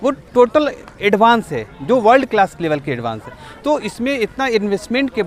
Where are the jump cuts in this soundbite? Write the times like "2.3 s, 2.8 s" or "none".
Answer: none